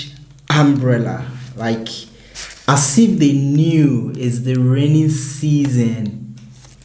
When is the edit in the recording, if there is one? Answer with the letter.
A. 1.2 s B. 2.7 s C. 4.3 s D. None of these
D